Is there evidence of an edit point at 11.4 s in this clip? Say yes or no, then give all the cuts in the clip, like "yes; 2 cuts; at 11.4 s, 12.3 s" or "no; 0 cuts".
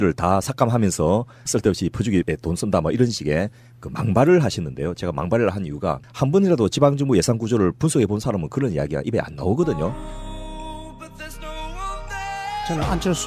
no; 1 cut; at 9.8 s